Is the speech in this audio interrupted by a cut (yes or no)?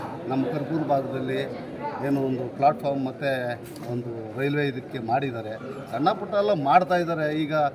no